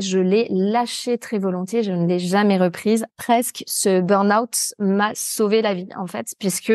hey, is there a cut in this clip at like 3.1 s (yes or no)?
yes